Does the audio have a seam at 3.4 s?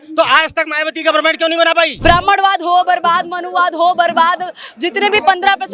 no; 1 cut; at 1.9 s

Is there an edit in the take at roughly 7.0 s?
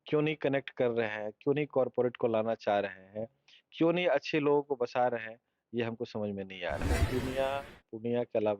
yes; 1 cut; at 7.0 s

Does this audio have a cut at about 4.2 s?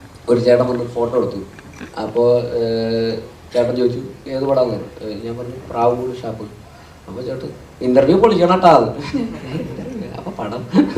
yes; 1 cut; at 4.2 s

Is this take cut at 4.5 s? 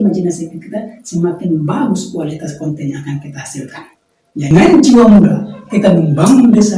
yes; 1 cut; at 4.5 s

